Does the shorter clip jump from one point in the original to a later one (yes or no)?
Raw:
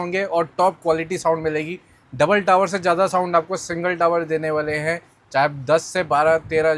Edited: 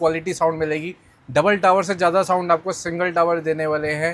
no